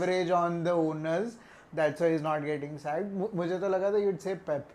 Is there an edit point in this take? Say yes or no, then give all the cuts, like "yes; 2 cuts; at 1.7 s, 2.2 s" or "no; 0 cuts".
no; 0 cuts